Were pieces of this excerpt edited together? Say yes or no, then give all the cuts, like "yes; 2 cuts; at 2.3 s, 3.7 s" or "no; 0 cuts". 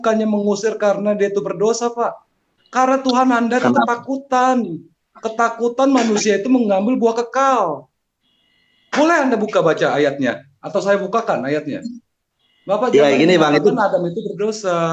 no; 0 cuts